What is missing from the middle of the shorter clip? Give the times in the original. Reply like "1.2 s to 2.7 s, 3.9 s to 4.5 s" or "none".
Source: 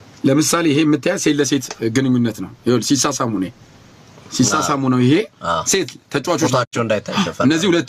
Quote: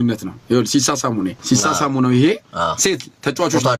3.5 s to 4.3 s